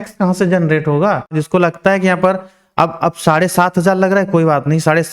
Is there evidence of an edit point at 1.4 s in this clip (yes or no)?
yes